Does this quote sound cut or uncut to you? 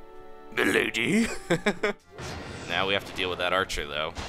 cut